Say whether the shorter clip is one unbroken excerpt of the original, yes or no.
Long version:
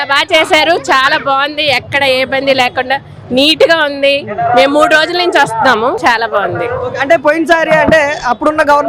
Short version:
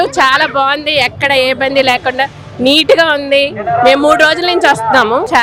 yes